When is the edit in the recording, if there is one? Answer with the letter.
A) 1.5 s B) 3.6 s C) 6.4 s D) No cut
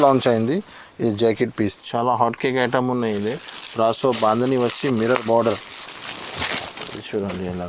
A